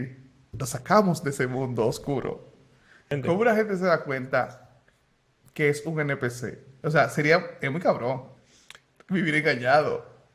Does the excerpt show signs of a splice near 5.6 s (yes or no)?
no